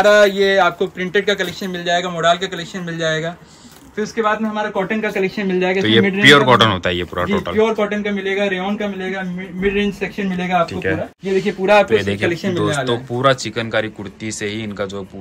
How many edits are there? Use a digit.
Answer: 1